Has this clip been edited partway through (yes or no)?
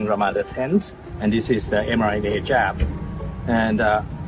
yes